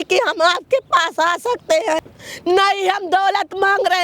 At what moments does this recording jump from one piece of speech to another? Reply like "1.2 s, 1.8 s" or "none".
2.0 s